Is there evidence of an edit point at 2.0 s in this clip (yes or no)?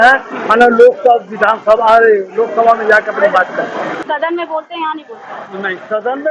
no